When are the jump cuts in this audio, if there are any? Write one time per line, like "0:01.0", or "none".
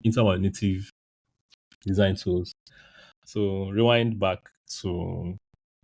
none